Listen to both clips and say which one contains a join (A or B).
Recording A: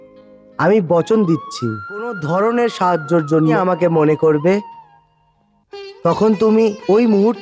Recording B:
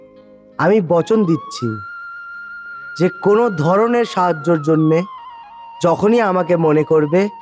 A